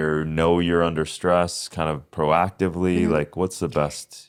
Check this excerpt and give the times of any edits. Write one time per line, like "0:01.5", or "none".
none